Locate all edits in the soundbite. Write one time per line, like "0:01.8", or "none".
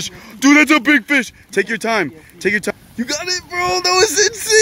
0:02.7